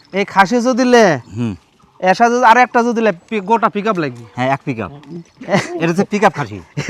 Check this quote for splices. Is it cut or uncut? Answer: uncut